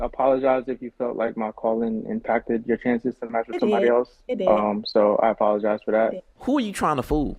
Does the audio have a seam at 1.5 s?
no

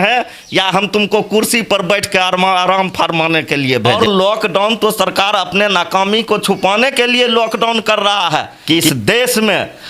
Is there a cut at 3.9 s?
yes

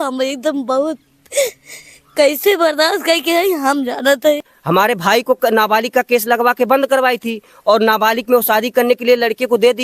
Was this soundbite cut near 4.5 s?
yes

